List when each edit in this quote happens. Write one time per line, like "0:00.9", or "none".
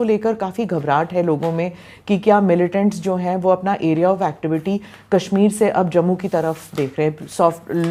none